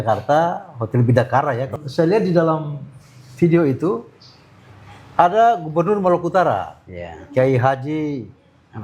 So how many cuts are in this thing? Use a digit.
1